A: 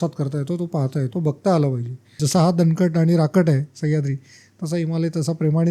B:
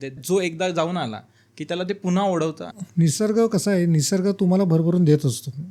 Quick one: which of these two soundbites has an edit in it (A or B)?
A